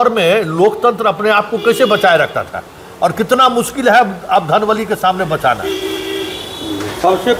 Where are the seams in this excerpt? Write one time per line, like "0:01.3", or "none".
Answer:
none